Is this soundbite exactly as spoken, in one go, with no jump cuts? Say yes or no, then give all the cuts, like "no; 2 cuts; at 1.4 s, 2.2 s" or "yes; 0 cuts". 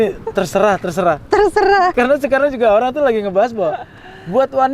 no; 1 cut; at 1.9 s